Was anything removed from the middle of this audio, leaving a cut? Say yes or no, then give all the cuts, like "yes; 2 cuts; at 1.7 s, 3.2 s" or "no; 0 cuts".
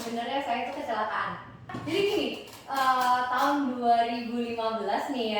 yes; 1 cut; at 1.8 s